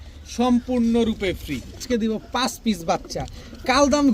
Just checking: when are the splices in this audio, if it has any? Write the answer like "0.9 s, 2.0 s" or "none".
1.7 s